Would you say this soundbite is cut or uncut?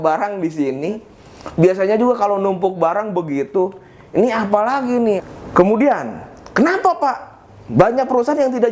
cut